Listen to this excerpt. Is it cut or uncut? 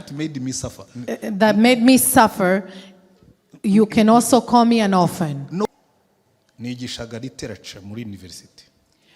cut